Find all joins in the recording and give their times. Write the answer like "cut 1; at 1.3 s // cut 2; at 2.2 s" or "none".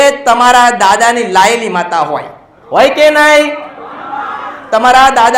none